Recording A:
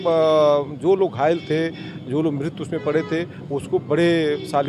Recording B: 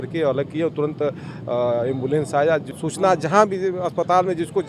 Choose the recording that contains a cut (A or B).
B